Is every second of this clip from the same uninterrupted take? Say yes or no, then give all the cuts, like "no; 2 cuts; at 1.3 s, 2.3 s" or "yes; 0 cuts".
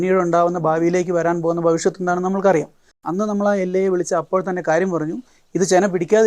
no; 1 cut; at 3.0 s